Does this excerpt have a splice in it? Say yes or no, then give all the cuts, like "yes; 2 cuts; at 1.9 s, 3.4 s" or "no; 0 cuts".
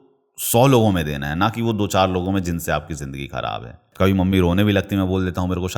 yes; 1 cut; at 3.8 s